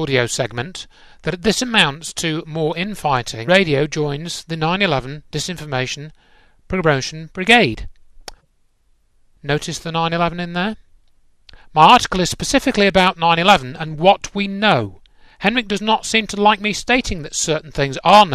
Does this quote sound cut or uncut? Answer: uncut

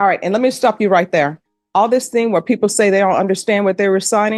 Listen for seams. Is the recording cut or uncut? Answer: uncut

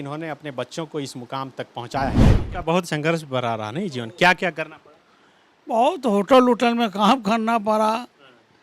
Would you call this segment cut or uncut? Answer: cut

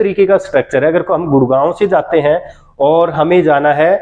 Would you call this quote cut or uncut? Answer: uncut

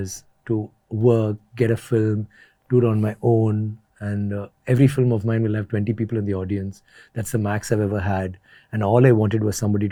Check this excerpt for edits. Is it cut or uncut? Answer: uncut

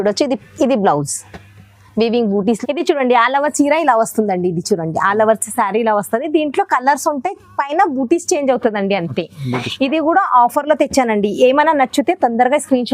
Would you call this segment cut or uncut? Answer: uncut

